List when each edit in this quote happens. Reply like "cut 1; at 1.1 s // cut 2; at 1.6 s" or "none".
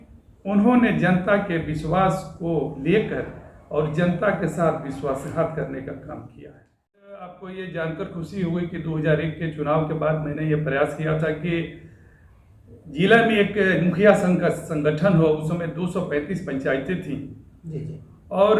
cut 1; at 7.3 s